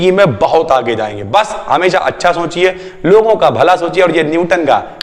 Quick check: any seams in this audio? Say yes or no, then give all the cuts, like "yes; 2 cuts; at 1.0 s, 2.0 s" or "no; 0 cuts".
no; 0 cuts